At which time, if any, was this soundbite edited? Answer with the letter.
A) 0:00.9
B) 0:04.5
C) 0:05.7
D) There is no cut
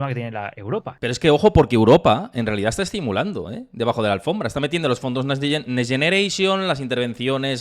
A